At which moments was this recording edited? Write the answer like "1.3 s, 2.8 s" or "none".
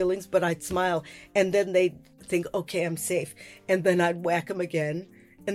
1.2 s, 2.1 s